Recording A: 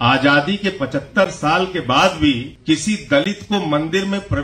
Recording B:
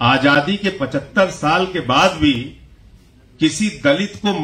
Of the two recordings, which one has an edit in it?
A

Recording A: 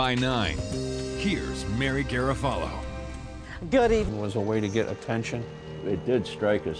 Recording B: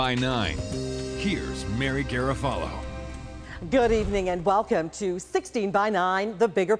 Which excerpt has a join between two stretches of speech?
B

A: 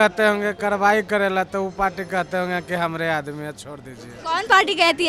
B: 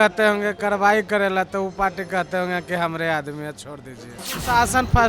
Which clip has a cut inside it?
B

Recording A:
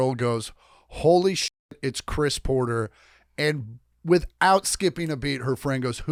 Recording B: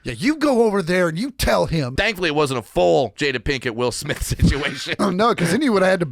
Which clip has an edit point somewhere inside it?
B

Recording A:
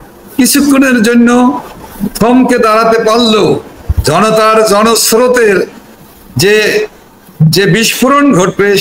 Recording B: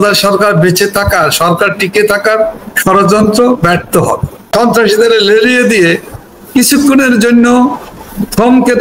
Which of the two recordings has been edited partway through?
B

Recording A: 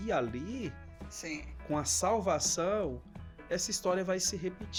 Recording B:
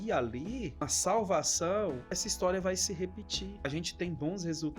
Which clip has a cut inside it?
B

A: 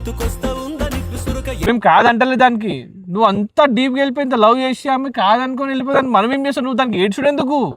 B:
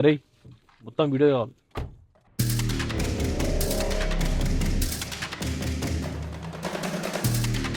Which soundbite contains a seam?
A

